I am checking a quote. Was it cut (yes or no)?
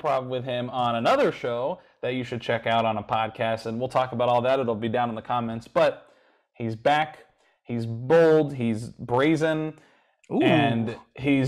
no